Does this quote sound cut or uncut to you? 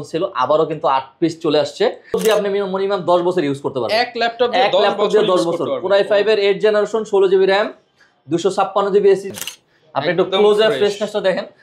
cut